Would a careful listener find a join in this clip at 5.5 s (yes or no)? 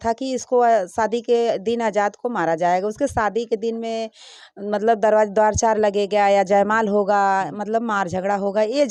no